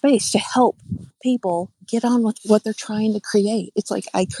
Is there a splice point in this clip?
yes; 2 cuts; at 1.2 s, 2.2 s

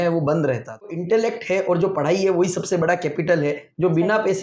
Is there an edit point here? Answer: yes; 1 cut; at 1.0 s

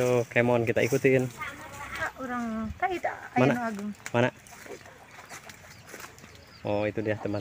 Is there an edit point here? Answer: yes; 1 cut; at 2.1 s

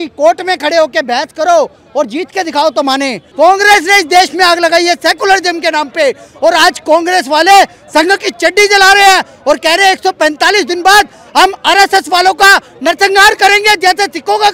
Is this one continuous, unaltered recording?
no; 1 cut; at 3.2 s

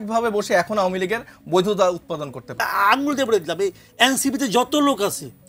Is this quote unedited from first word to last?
no; 1 cut; at 2.5 s

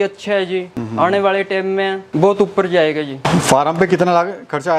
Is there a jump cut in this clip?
no; 0 cuts

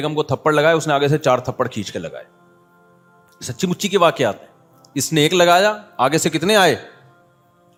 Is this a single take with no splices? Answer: yes; 0 cuts

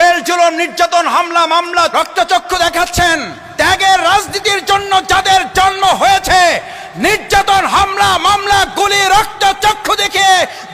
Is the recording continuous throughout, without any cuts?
no; 2 cuts; at 1.9 s, 3.4 s

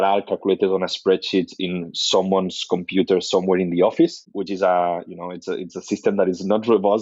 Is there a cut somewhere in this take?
yes; 1 cut; at 4.3 s

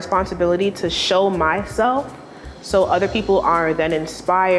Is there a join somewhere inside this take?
no; 0 cuts

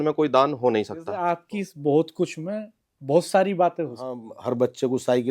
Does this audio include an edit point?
yes; 2 cuts; at 1.1 s, 4.3 s

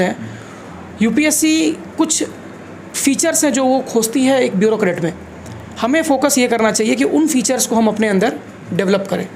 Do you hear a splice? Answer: no; 0 cuts

